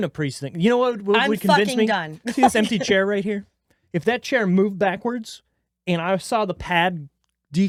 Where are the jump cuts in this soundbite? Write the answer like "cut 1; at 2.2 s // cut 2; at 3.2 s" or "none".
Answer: none